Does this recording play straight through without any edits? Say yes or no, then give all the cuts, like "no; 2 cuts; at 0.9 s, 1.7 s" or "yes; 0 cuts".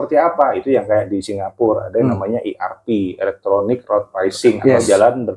yes; 0 cuts